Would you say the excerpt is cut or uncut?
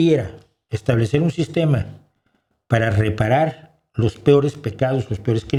uncut